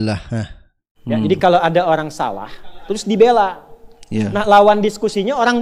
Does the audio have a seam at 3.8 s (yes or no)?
no